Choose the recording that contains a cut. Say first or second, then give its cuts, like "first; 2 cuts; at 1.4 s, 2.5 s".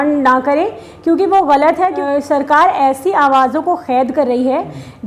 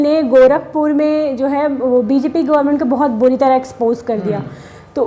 first; 1 cut; at 2.0 s